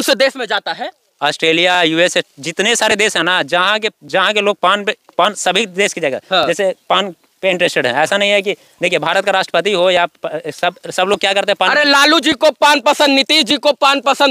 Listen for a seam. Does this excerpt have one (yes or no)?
no